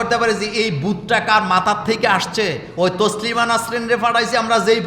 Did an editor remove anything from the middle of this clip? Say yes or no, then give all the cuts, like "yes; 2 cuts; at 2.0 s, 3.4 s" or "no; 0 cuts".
no; 0 cuts